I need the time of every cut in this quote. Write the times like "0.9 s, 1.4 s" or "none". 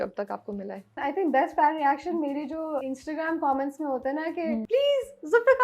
1.0 s, 2.8 s, 4.6 s